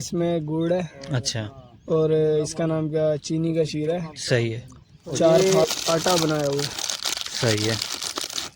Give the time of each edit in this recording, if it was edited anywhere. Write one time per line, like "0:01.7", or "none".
0:05.4